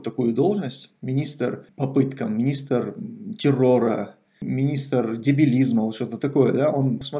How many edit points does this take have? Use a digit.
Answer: 1